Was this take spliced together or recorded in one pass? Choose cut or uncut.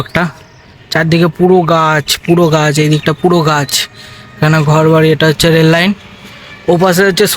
uncut